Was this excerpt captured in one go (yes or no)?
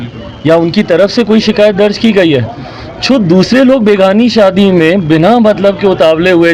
yes